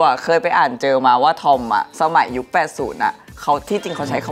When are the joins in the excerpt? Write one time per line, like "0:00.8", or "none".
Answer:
none